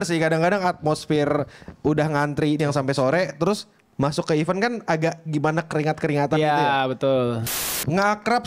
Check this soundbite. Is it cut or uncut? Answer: cut